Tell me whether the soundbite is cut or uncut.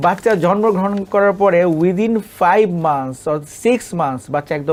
uncut